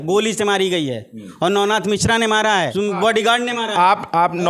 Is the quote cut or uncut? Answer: cut